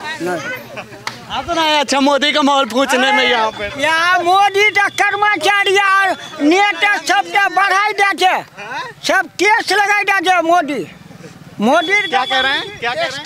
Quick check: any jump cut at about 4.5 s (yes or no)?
no